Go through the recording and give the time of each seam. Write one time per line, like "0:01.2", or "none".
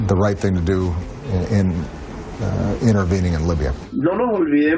0:03.9